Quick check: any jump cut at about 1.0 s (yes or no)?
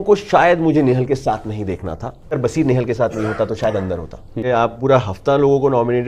no